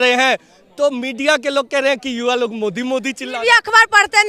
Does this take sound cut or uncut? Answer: uncut